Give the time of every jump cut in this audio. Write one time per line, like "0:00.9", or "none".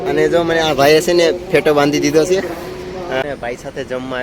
0:03.2